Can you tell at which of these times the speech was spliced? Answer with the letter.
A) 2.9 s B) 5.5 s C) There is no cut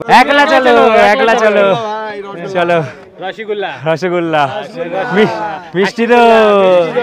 C